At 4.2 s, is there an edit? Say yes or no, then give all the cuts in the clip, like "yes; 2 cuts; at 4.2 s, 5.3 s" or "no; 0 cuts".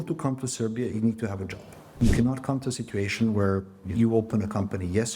no; 1 cut; at 2.0 s